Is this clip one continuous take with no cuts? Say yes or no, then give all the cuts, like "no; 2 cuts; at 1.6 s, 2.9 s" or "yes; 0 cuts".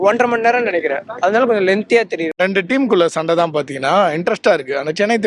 no; 1 cut; at 2.2 s